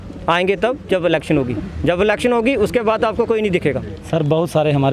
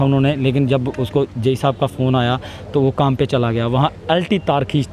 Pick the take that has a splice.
first; 1 cut; at 3.9 s

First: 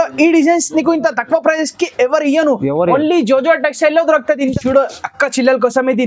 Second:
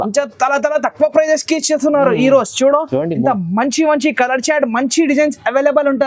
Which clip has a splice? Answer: first; 1 cut; at 4.5 s

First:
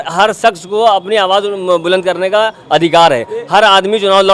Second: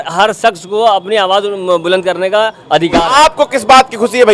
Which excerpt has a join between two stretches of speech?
second; 1 cut; at 3.0 s

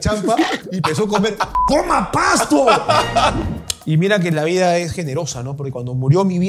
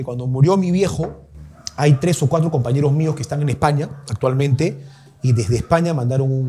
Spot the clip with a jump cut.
first; 1 cut; at 3.4 s

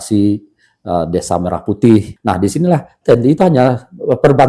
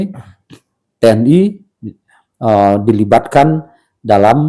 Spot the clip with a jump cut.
first; 1 cut; at 2.1 s

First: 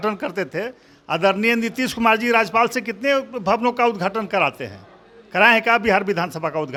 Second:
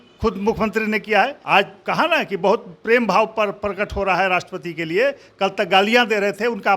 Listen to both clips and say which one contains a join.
second; 1 cut; at 1.4 s

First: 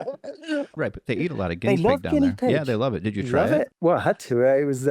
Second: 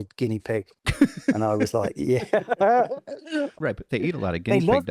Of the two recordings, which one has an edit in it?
first; 1 cut; at 3.7 s

